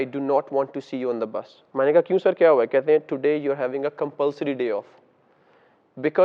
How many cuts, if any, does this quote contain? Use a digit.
0